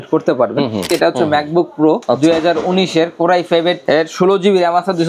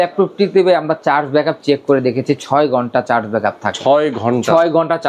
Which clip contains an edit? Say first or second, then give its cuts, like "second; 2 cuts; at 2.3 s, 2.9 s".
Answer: first; 3 cuts; at 0.9 s, 2.0 s, 3.8 s